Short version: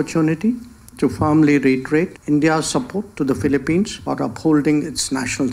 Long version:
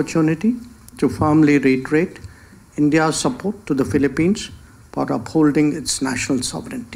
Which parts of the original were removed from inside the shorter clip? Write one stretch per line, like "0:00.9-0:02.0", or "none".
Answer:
0:02.2-0:02.7
0:04.5-0:04.9